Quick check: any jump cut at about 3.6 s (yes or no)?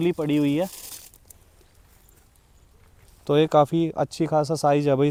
no